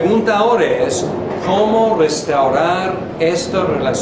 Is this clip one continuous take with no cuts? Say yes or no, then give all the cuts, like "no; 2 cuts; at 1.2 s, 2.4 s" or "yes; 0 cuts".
no; 1 cut; at 2.1 s